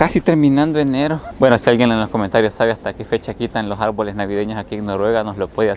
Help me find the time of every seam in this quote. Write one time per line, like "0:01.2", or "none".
none